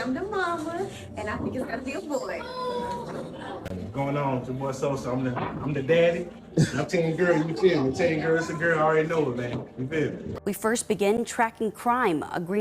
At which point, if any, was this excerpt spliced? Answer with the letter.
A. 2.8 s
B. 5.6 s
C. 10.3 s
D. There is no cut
C